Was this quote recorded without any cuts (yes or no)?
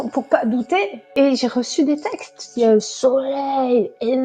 no